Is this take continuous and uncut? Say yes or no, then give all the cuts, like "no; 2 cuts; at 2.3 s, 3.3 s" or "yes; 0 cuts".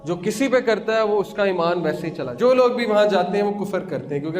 no; 1 cut; at 2.2 s